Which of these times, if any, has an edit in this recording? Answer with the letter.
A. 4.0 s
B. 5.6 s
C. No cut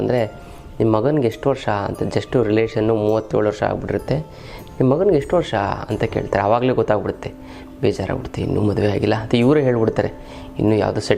C